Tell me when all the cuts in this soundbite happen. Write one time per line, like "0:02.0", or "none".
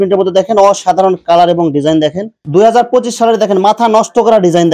0:02.4